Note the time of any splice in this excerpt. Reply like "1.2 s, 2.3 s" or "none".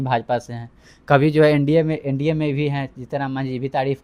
none